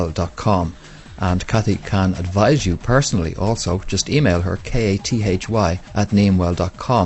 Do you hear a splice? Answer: no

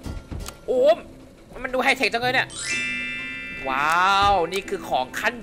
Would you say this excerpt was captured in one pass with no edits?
yes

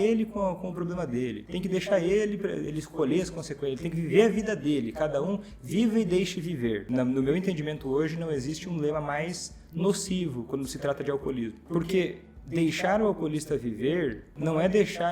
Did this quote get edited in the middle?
yes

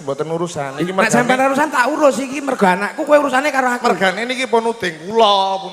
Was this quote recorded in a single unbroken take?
yes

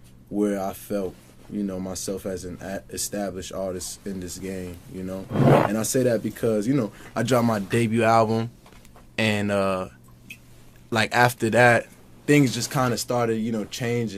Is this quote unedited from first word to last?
yes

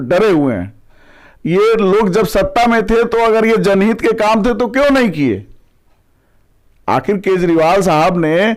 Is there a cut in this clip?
no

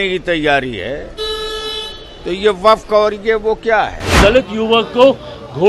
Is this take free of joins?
no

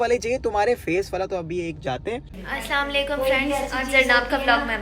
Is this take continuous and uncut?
no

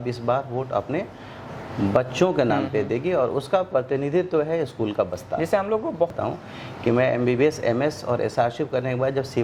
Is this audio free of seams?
no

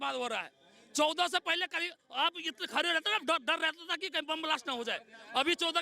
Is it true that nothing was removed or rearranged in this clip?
yes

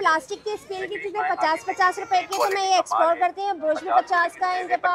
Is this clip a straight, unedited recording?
yes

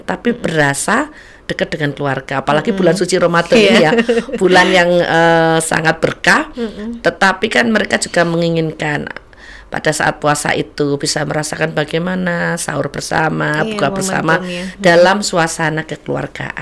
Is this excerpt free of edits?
yes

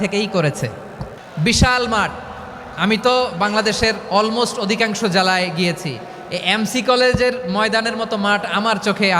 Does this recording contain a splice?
yes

